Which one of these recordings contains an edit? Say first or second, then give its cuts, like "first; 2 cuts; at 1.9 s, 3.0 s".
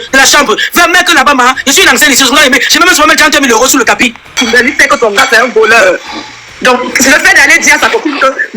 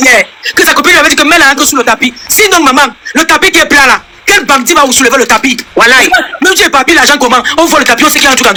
first; 1 cut; at 4.3 s